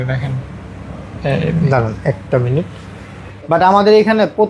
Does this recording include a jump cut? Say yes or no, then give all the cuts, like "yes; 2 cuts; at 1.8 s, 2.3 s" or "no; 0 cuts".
yes; 1 cut; at 3.3 s